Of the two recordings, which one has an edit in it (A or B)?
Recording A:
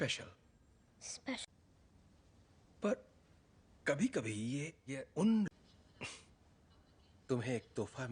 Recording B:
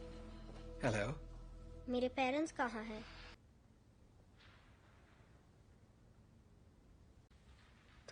B